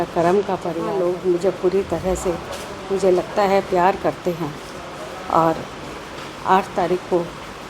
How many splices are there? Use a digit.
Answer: 1